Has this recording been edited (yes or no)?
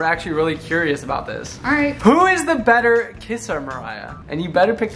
no